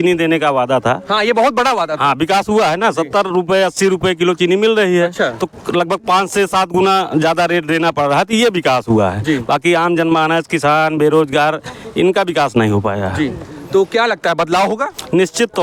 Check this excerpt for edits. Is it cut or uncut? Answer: uncut